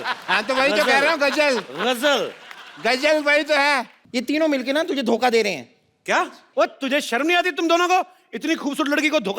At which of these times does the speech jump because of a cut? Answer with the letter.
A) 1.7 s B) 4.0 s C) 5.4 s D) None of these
B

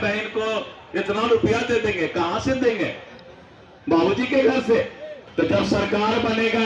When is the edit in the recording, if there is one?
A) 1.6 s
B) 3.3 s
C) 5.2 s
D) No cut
C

